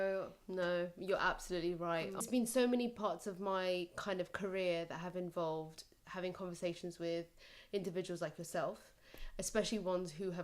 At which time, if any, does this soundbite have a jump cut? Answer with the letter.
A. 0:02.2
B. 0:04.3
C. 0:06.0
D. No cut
A